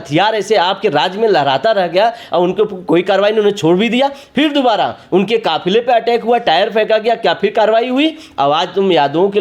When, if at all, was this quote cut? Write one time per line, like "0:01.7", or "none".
none